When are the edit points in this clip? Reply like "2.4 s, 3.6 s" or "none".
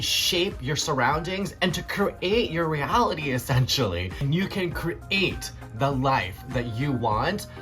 1.5 s, 4.1 s

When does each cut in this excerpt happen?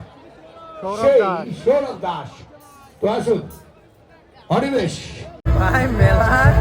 5.4 s

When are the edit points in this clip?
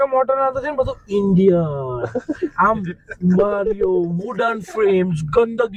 none

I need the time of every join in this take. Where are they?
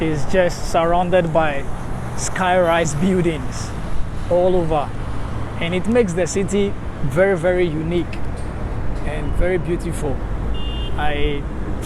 none

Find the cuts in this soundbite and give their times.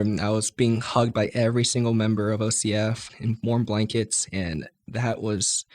3.1 s

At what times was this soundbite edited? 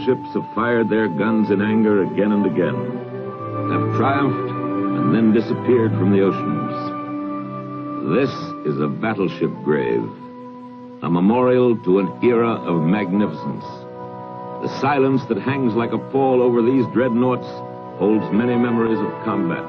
13.2 s

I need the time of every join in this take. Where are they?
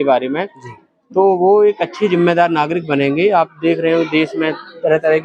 none

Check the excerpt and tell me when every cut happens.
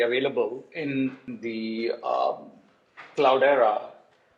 1.3 s

